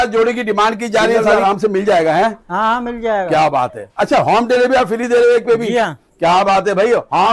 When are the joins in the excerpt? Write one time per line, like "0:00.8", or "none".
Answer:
0:01.3